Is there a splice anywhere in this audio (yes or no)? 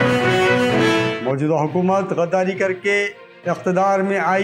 yes